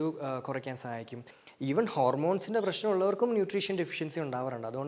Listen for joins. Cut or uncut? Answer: cut